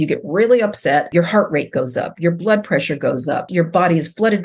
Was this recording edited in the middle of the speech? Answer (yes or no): yes